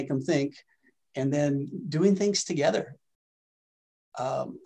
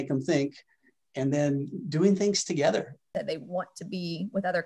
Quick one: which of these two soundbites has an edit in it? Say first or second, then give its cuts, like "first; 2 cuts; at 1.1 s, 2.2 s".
second; 1 cut; at 3.1 s